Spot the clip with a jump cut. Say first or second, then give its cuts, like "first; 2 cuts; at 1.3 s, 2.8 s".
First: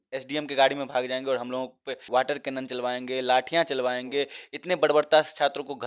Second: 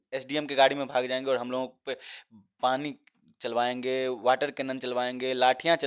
first; 1 cut; at 2.0 s